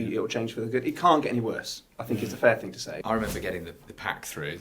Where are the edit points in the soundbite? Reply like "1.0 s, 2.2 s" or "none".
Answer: 3.0 s